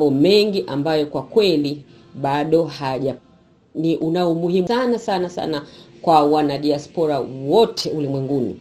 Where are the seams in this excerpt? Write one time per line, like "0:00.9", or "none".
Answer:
0:03.2
0:04.7